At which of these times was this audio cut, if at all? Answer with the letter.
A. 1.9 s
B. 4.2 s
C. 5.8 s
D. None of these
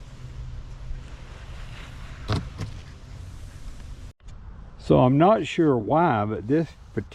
B